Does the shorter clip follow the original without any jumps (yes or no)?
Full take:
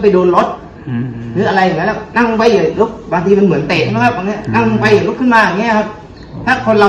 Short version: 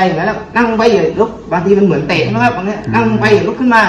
yes